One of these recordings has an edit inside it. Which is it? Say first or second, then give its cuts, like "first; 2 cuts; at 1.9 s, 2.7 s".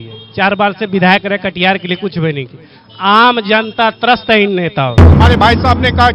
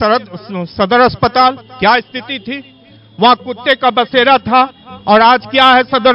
first; 1 cut; at 5.2 s